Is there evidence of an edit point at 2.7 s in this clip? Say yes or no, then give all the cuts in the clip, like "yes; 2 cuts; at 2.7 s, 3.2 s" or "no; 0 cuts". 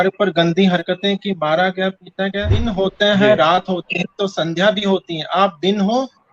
yes; 1 cut; at 2.7 s